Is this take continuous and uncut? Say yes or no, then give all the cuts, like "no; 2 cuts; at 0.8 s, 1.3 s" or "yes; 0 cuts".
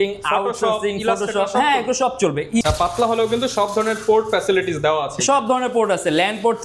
no; 1 cut; at 2.6 s